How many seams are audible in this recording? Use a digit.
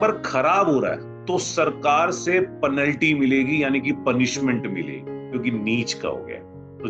0